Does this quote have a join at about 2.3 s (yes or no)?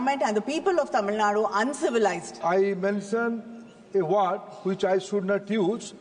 yes